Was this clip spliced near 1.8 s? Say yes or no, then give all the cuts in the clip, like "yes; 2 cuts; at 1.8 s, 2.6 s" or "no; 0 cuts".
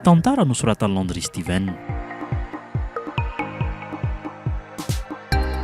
yes; 1 cut; at 1.8 s